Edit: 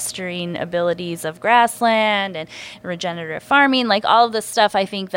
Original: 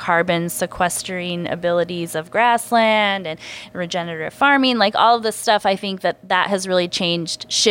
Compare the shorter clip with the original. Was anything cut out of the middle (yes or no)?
no